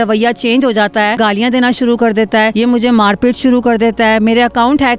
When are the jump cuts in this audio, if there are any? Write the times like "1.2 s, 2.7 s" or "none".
1.2 s, 2.5 s

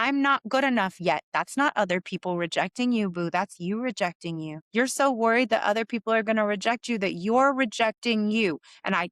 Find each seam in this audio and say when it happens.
4.6 s

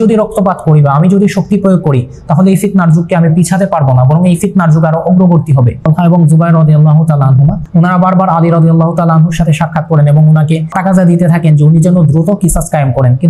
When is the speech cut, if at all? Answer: 5.9 s, 7.6 s, 10.7 s

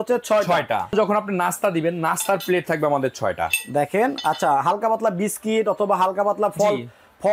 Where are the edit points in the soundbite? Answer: 0.9 s

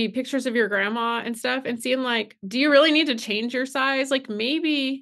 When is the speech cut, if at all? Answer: 2.4 s

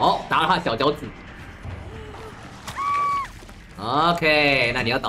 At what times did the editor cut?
1.6 s

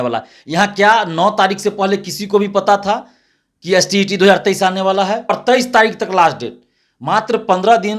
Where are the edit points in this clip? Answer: 5.3 s

